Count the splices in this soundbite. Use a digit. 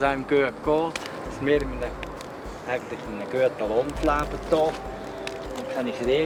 0